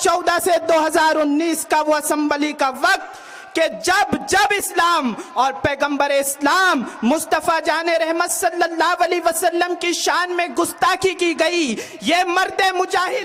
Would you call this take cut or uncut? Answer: uncut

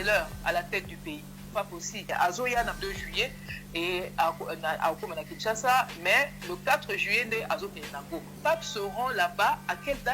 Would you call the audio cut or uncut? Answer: cut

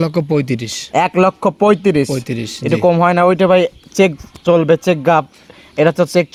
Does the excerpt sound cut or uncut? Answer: uncut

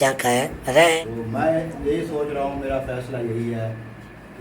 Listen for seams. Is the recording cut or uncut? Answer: cut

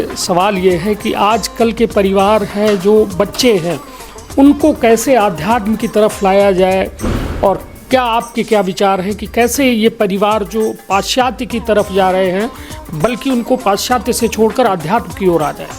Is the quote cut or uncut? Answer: uncut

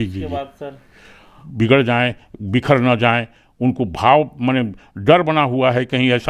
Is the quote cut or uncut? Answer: cut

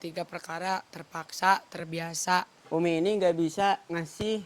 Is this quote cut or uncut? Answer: cut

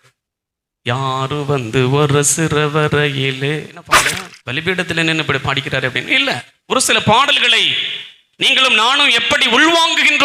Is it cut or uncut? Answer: cut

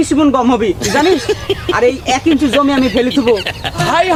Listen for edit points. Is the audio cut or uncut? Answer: uncut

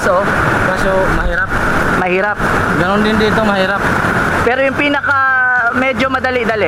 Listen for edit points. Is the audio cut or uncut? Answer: uncut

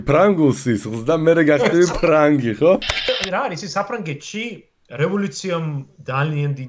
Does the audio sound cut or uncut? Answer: cut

